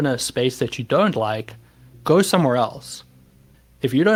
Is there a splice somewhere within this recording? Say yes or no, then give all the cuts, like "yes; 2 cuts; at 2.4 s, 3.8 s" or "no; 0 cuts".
no; 0 cuts